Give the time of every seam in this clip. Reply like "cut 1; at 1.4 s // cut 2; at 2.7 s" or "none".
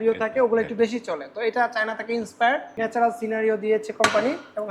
cut 1; at 2.7 s